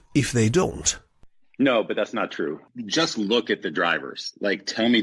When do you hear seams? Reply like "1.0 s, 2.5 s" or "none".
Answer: 2.6 s